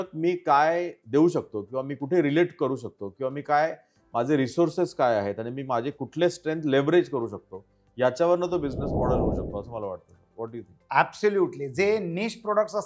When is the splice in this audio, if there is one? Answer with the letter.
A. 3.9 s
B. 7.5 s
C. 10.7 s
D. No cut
C